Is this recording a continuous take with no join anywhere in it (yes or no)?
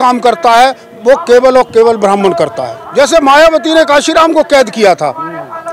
no